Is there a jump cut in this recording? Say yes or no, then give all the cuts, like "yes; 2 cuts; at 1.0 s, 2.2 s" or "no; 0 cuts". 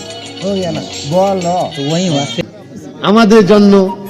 yes; 1 cut; at 2.3 s